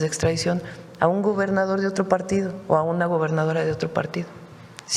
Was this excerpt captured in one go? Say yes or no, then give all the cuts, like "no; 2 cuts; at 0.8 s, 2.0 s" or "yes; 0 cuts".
yes; 0 cuts